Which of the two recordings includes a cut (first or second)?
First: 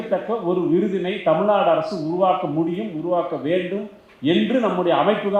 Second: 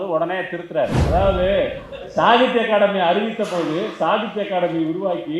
second